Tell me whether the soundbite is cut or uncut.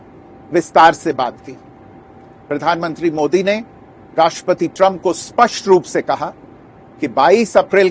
uncut